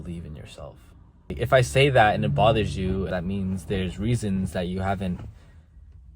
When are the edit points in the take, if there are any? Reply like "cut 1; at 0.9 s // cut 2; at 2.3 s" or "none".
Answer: cut 1; at 1.3 s // cut 2; at 3.1 s